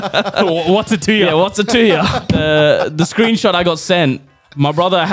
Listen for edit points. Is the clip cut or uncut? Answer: cut